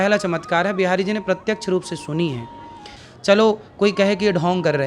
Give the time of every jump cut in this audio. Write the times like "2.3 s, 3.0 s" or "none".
2.9 s